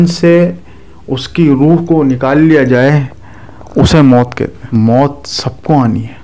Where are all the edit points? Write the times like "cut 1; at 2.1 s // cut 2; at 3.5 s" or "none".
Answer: cut 1; at 4.7 s

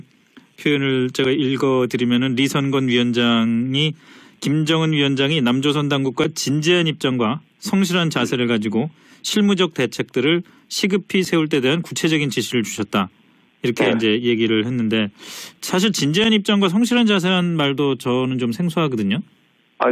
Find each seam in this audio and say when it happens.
none

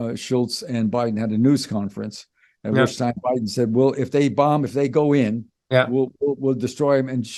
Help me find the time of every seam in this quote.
none

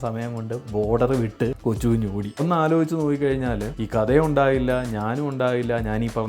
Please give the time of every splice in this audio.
cut 1; at 2.4 s

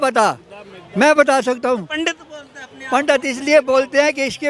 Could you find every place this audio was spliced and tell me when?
none

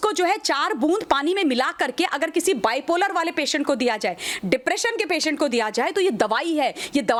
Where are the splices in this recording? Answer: none

